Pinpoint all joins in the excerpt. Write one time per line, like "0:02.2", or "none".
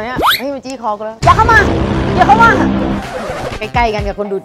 none